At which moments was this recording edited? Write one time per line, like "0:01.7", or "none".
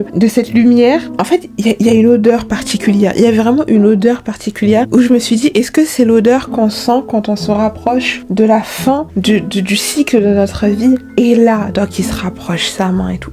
none